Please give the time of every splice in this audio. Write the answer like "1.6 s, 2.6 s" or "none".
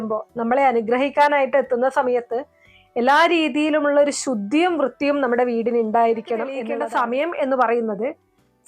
6.7 s